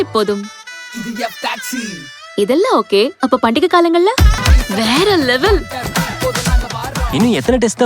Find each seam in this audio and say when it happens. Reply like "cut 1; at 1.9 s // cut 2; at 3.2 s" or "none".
cut 1; at 4.4 s